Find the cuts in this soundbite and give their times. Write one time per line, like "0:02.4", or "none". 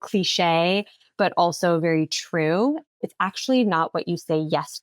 0:03.0